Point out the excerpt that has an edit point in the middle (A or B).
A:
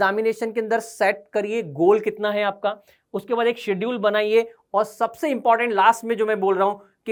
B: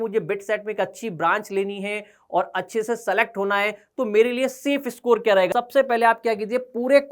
B